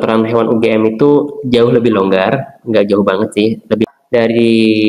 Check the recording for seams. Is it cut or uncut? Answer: cut